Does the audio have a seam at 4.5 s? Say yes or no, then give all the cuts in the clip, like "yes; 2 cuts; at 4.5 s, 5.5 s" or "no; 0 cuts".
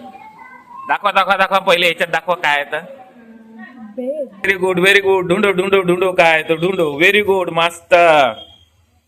yes; 1 cut; at 4.5 s